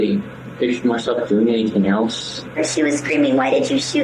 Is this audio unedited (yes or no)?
no